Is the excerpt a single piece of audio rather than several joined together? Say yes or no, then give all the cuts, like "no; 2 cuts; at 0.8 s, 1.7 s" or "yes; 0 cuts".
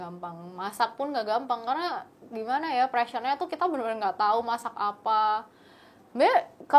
yes; 0 cuts